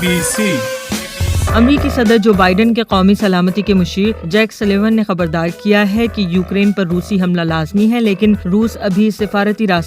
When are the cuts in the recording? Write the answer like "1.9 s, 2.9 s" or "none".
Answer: 1.4 s

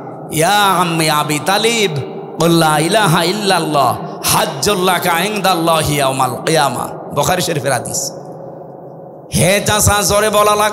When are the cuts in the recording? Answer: none

